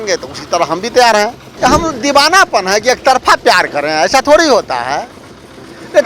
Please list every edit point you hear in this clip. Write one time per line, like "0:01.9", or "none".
0:01.4